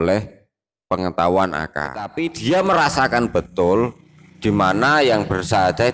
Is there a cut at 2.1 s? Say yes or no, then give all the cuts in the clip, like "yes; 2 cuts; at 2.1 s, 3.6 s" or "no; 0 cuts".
yes; 1 cut; at 2.1 s